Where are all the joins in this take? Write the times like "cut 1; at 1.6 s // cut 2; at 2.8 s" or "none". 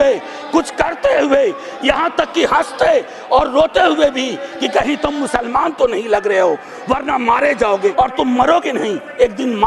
cut 1; at 7.9 s